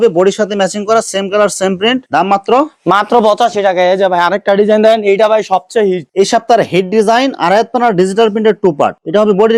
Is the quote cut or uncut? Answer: uncut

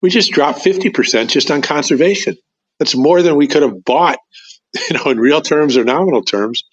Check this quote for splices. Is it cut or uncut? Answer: uncut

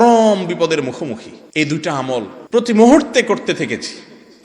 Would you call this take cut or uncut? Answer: cut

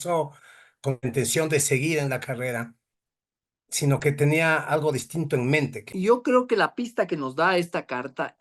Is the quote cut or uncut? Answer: cut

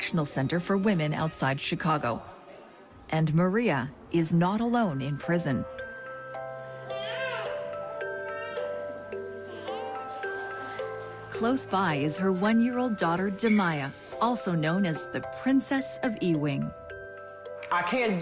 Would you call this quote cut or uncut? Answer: cut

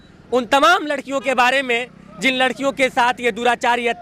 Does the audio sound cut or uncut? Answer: uncut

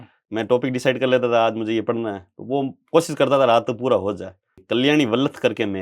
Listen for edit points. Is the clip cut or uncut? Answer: cut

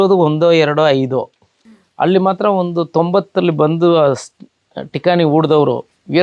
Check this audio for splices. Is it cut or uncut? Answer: cut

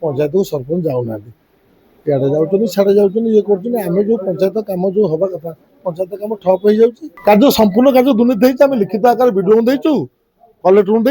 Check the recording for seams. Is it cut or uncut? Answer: cut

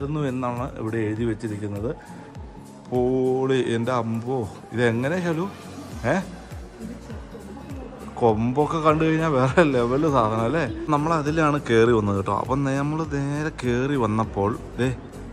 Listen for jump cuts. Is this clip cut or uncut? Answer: cut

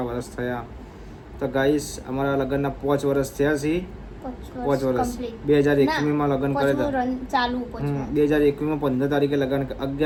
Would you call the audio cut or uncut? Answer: uncut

